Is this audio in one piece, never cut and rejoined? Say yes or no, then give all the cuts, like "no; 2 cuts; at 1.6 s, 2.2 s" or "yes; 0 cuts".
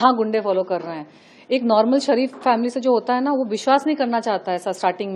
yes; 0 cuts